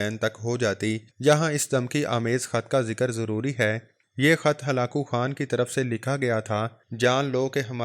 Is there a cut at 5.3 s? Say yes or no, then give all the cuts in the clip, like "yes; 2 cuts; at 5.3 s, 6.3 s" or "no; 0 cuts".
no; 3 cuts; at 1.1 s, 4.0 s, 6.8 s